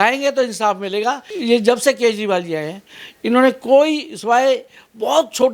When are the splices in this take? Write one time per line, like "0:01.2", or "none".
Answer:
none